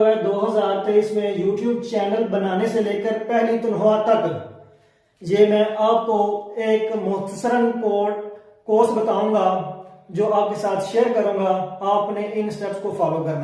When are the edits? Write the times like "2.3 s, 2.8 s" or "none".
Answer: none